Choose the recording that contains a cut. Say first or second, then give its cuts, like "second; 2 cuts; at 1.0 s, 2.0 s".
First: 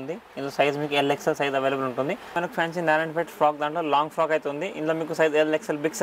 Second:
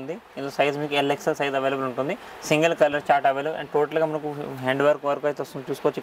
first; 1 cut; at 2.3 s